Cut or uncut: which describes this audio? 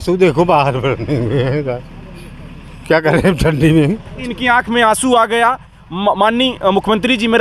cut